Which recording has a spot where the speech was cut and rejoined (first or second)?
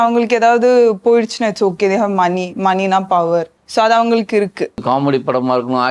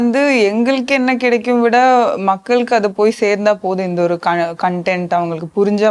first